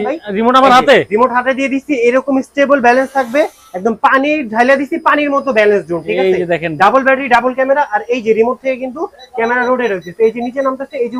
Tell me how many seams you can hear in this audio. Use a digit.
0